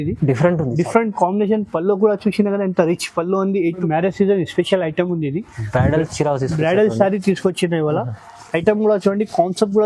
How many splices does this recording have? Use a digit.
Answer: 1